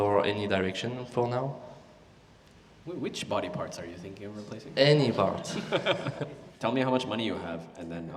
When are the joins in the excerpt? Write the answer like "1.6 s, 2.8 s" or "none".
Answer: 6.4 s

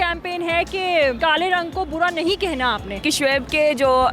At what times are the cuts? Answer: 1.2 s, 3.0 s

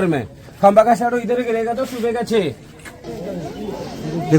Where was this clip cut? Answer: 3.1 s

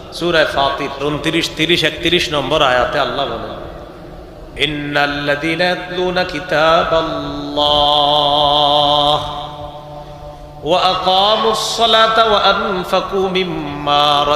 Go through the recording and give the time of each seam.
1.0 s

